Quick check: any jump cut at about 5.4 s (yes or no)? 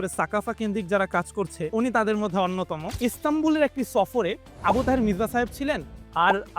no